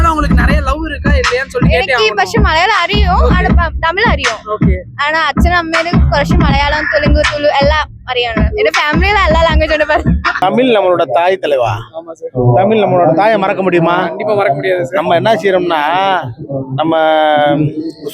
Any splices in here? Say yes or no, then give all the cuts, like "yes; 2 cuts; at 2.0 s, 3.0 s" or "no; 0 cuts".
yes; 1 cut; at 10.4 s